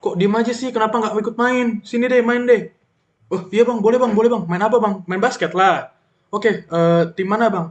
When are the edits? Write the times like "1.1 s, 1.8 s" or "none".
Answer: none